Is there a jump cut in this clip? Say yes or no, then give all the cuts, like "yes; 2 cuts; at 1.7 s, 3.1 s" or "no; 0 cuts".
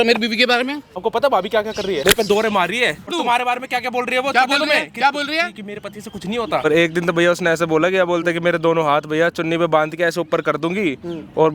yes; 4 cuts; at 1.0 s, 2.0 s, 3.1 s, 6.6 s